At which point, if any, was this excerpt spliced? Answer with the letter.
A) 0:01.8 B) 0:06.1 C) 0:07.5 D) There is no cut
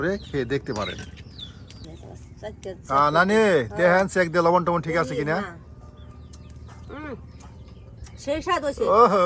A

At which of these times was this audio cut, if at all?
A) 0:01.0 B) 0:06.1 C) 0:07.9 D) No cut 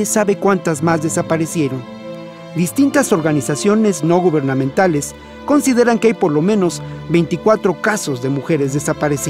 B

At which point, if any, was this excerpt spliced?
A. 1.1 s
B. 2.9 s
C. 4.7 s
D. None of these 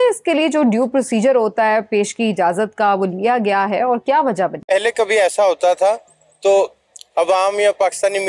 C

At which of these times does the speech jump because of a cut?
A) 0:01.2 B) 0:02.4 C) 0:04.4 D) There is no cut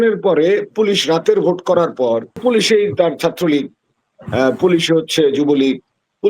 B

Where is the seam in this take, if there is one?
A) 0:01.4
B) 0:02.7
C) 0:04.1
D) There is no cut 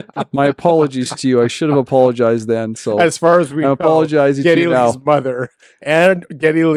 D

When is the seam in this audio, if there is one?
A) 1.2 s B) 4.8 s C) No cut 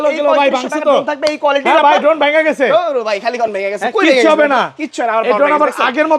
C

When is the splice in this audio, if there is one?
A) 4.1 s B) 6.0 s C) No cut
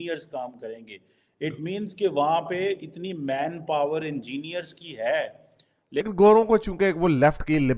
B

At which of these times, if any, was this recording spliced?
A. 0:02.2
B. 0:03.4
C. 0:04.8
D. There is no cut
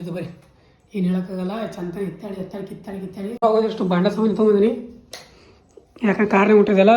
B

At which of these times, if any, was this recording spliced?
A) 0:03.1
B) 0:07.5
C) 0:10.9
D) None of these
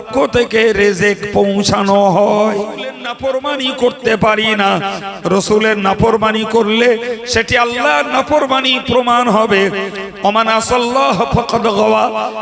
A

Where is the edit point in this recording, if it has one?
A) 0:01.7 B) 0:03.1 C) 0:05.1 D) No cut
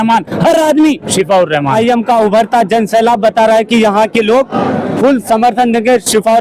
A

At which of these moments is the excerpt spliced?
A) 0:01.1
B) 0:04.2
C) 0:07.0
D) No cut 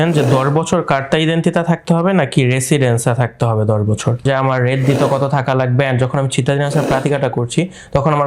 B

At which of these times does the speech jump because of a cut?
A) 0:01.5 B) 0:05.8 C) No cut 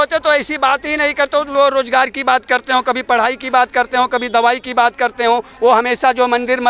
A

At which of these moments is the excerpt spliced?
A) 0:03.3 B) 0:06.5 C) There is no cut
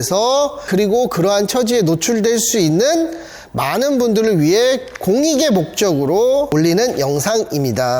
B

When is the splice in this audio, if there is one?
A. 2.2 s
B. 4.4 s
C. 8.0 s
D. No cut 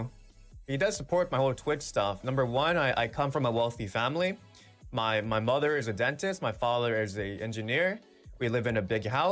A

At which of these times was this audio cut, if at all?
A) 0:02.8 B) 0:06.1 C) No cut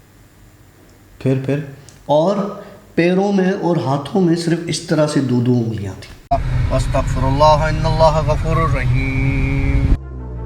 B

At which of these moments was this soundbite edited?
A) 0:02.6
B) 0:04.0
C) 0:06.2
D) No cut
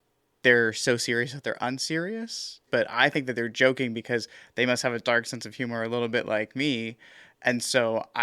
A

